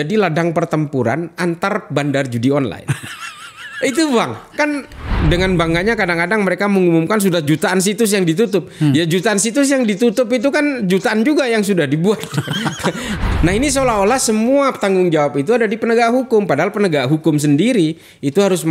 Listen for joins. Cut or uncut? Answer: cut